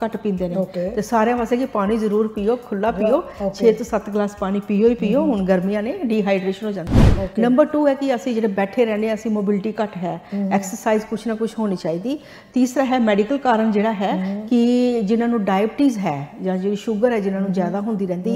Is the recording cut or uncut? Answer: uncut